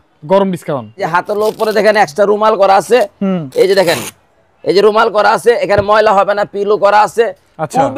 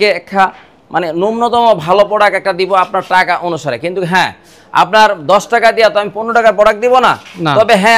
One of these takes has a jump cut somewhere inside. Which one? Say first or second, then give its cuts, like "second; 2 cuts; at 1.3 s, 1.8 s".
first; 1 cut; at 1.0 s